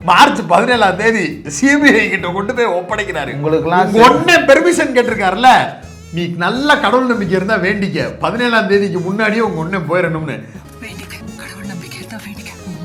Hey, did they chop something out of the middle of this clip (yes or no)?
no